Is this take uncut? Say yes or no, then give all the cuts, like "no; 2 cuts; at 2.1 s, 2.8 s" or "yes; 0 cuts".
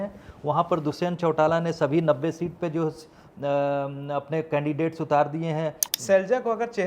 no; 1 cut; at 5.8 s